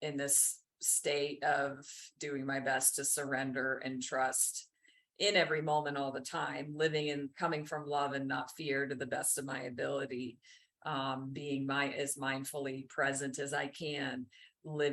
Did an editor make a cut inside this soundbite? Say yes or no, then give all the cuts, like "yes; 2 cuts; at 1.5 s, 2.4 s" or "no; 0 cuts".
no; 0 cuts